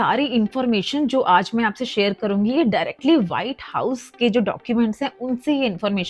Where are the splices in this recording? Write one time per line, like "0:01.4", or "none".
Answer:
none